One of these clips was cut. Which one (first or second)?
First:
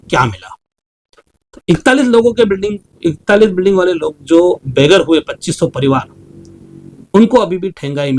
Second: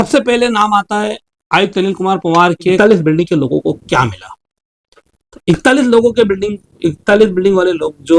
second